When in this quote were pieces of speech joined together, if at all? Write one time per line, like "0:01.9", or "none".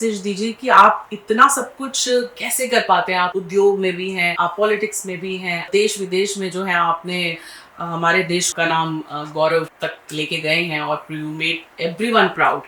0:03.4
0:04.3
0:05.7
0:08.5
0:09.7